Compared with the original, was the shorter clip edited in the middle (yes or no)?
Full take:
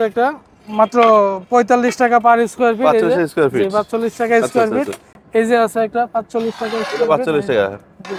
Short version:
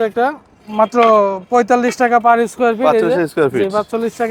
no